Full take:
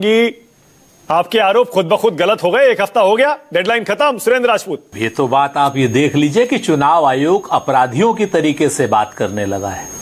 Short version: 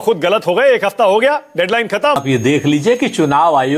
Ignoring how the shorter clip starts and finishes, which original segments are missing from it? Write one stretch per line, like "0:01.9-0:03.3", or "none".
0:04.2-0:05.7